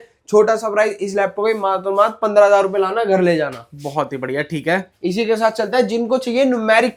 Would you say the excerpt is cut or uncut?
uncut